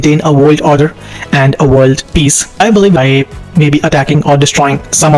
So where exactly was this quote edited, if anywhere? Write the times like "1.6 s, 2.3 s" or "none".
3.0 s